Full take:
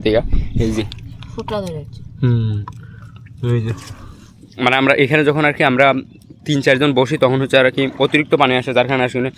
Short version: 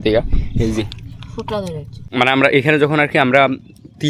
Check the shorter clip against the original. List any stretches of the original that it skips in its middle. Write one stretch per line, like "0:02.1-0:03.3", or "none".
0:01.9-0:04.4